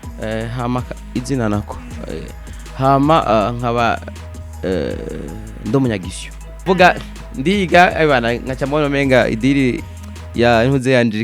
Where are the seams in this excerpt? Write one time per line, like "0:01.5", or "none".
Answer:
0:06.6